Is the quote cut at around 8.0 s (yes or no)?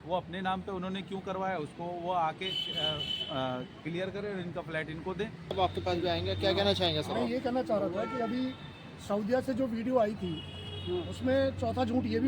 no